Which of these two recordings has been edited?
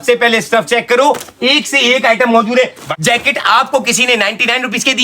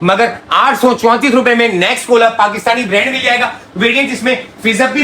first; 1 cut; at 2.9 s

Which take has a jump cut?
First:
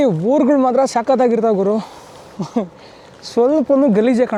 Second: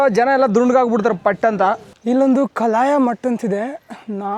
second; 1 cut; at 1.9 s

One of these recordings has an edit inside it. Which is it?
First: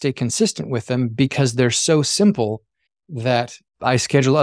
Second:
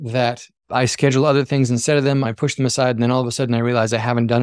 second; 1 cut; at 2.3 s

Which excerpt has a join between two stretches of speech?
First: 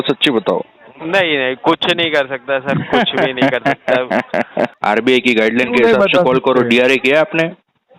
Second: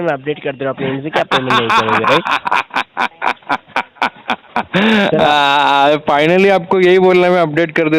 first; 1 cut; at 4.8 s

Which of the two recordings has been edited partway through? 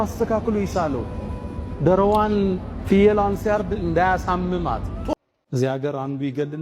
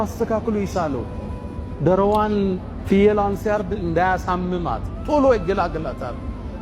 first; 1 cut; at 5.0 s

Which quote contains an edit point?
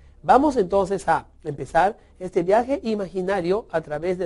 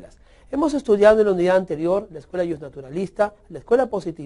first; 1 cut; at 2.4 s

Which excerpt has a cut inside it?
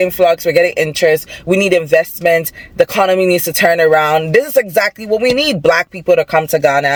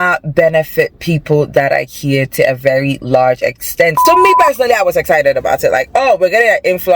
second; 1 cut; at 4.0 s

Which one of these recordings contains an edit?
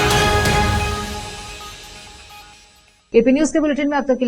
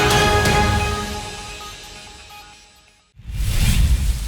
second; 1 cut; at 3.0 s

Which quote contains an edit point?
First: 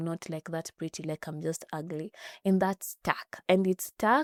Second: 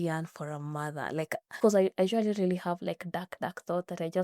second; 1 cut; at 1.5 s

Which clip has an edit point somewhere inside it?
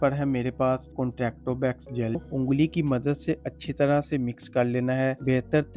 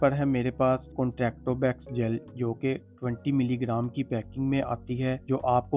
first; 1 cut; at 2.2 s

